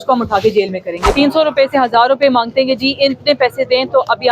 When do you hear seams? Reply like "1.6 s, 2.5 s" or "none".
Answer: 1.1 s